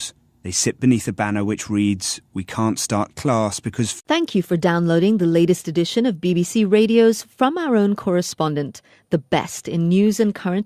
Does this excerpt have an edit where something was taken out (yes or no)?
no